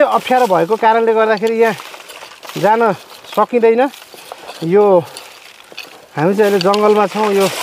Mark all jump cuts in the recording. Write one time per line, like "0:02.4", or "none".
none